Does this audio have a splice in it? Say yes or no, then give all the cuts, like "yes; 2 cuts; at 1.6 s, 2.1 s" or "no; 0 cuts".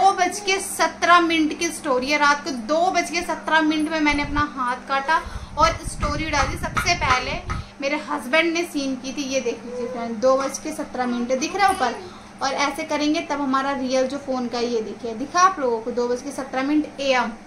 no; 0 cuts